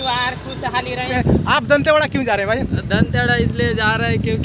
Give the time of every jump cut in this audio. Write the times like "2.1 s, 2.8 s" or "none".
1.1 s